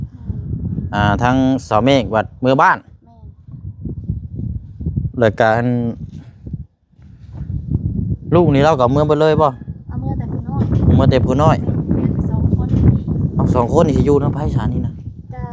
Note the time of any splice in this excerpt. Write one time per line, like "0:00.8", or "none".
none